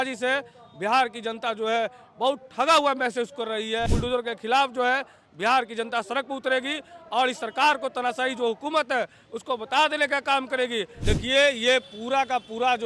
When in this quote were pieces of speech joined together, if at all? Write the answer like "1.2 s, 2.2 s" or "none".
3.9 s, 10.9 s